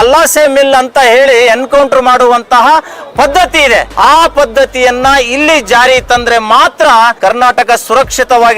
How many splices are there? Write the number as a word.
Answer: two